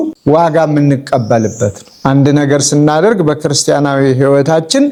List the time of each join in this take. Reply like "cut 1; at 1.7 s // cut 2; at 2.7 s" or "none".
none